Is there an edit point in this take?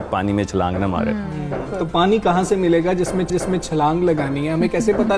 no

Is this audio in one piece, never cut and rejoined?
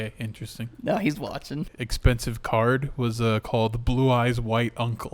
no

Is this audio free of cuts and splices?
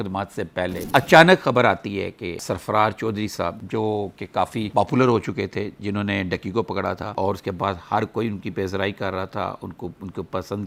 yes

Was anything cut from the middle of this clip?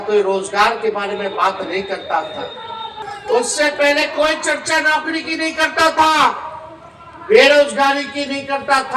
yes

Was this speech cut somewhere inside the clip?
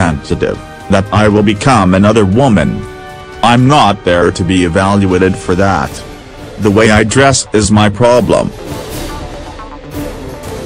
yes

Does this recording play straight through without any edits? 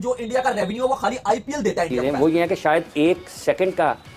no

